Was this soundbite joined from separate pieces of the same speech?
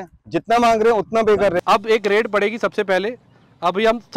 yes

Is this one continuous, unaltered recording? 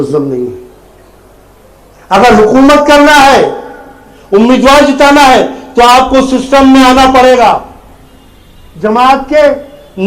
yes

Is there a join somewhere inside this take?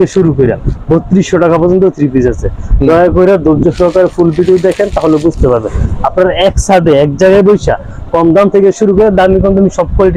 no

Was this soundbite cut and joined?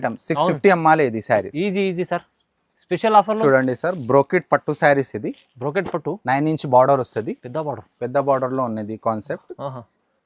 yes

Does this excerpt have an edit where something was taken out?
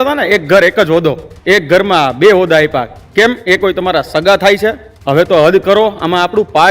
yes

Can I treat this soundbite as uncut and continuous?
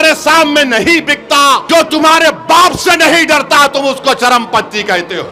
no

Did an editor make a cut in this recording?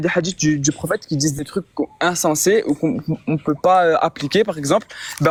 no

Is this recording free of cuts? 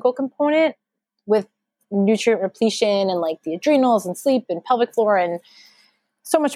yes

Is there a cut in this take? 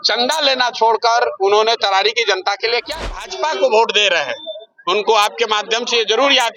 yes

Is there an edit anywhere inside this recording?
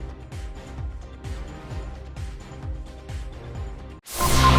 no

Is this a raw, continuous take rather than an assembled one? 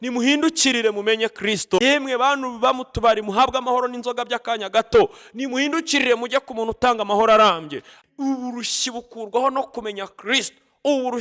no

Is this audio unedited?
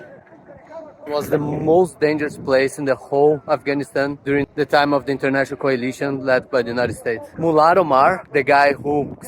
no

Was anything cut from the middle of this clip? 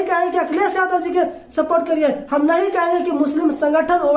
no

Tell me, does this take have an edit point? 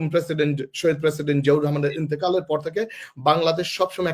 no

